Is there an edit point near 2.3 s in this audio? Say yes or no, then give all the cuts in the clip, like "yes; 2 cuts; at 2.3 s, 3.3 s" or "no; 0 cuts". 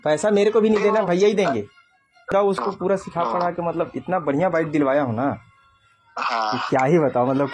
yes; 1 cut; at 2.3 s